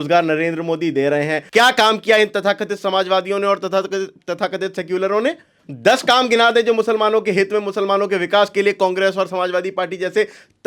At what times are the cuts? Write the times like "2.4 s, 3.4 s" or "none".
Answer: 1.4 s, 5.7 s